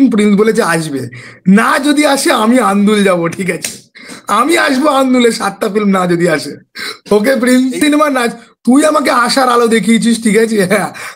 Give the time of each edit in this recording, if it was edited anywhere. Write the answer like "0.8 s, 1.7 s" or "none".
7.8 s